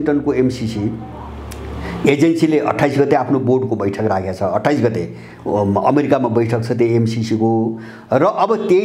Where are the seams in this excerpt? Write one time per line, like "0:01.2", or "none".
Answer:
none